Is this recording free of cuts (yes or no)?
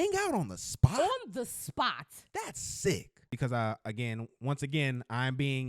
no